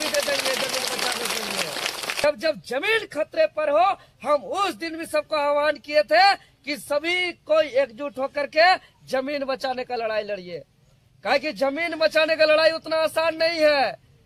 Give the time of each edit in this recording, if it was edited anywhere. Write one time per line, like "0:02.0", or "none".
0:02.2